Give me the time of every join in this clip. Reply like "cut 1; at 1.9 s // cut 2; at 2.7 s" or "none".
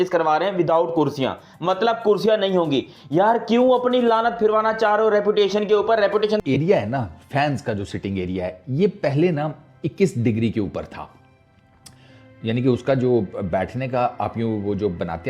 cut 1; at 6.4 s